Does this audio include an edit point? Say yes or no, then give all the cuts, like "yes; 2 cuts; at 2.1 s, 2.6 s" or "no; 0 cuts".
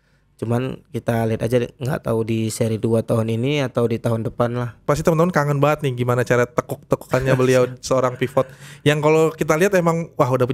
yes; 1 cut; at 4.8 s